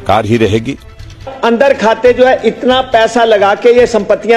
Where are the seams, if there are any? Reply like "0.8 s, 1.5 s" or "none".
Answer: 1.3 s